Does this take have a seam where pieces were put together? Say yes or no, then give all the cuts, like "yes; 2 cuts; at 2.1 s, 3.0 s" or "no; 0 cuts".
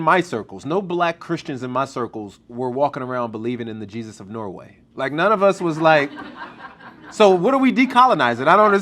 no; 0 cuts